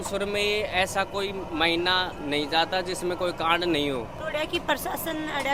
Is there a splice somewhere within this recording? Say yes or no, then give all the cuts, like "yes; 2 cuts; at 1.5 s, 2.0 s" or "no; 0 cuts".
no; 0 cuts